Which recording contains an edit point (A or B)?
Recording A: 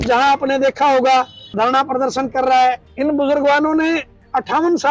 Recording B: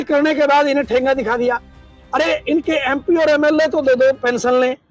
A